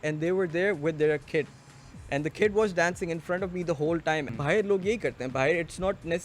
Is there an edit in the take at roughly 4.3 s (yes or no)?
yes